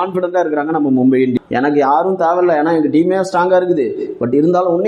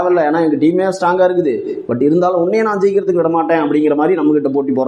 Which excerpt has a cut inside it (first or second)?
first